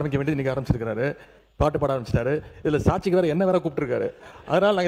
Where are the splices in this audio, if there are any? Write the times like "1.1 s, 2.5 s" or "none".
none